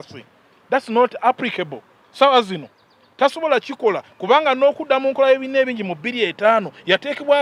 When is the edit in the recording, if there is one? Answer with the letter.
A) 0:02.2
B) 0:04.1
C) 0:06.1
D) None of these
D